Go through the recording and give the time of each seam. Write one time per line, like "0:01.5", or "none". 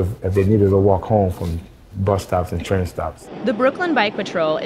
0:03.2